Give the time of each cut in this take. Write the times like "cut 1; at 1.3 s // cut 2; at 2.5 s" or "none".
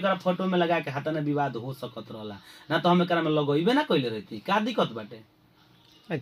none